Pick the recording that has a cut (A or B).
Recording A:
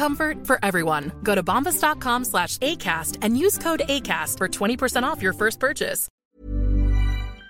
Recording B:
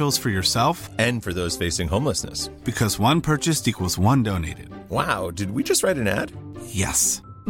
A